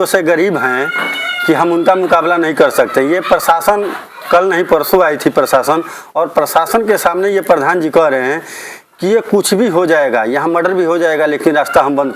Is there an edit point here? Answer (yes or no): no